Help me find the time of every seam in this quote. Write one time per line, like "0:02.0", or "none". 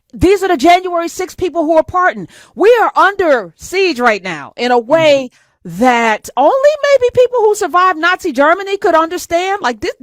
none